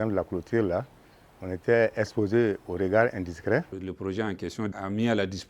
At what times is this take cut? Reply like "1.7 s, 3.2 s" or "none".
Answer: 3.7 s